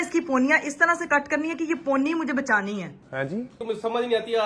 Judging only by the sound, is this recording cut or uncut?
cut